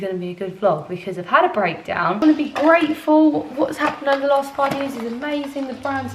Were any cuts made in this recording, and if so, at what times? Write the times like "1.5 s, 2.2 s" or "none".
2.2 s